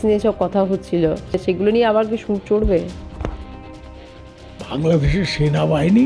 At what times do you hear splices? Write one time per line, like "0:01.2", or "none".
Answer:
0:01.4
0:04.0